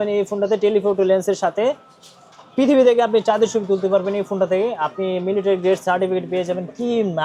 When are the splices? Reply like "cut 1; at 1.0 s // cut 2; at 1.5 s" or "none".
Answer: none